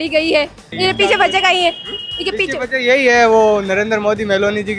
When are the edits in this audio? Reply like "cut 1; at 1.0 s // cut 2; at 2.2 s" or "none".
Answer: none